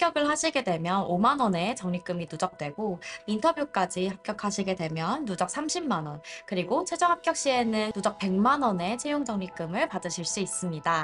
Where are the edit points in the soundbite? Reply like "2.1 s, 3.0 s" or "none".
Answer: 3.1 s, 7.9 s